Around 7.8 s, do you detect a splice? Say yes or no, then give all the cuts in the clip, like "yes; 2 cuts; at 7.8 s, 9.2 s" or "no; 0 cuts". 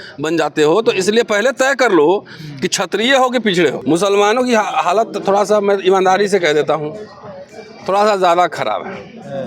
no; 1 cut; at 3.8 s